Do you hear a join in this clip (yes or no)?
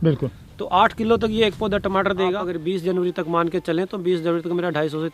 yes